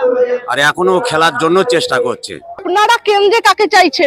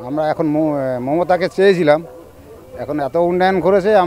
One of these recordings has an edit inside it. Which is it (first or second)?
first